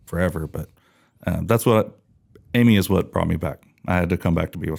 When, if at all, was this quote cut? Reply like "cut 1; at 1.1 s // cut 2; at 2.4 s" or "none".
none